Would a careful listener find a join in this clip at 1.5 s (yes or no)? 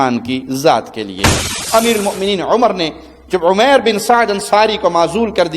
yes